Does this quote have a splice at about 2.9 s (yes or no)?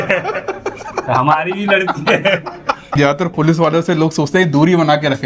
yes